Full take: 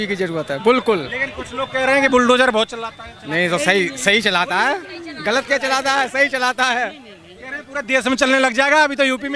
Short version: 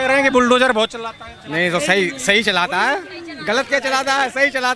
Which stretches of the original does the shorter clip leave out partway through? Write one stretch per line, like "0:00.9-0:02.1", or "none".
none